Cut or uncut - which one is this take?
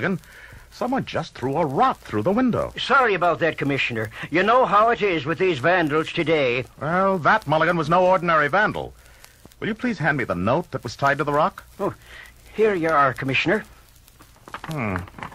uncut